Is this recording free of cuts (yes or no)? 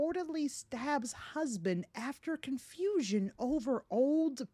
yes